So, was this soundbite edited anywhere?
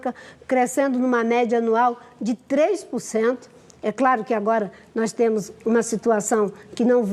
no; 0 cuts

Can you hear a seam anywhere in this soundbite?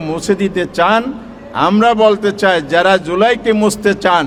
no; 0 cuts

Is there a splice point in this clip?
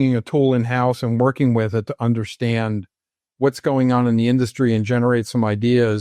no; 0 cuts

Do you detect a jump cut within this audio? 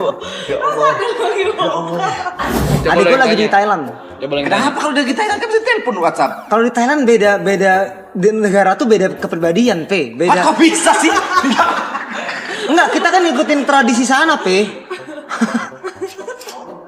yes; 1 cut; at 2.7 s

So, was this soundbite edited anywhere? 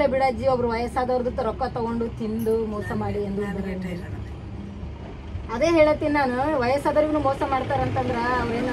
no; 0 cuts

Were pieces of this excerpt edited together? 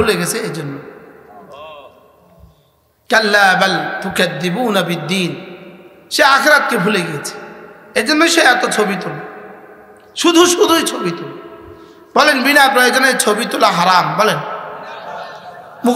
no; 0 cuts

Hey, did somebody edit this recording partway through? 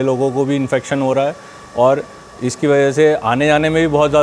no; 0 cuts

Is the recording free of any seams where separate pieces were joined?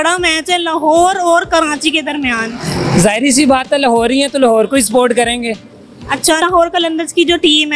yes; 0 cuts

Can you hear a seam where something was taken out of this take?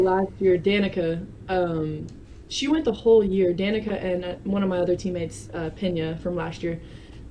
no; 0 cuts

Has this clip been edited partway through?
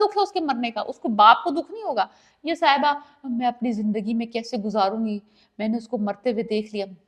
no; 0 cuts

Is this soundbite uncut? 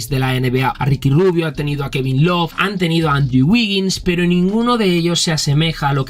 no; 2 cuts; at 0.8 s, 2.5 s

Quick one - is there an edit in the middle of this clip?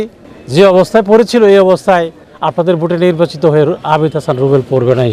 no; 0 cuts

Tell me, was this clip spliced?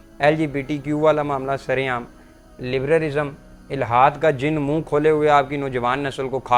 no; 0 cuts

